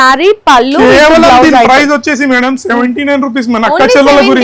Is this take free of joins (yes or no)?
yes